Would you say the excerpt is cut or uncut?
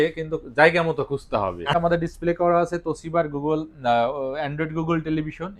cut